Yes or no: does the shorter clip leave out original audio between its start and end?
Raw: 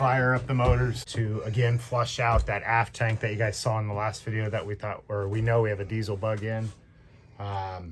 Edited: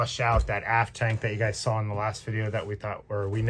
no